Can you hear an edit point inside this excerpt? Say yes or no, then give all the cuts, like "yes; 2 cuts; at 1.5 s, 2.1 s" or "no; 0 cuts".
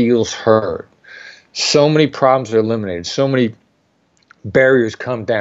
no; 0 cuts